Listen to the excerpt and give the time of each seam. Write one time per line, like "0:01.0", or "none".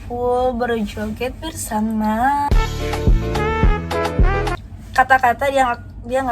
0:04.6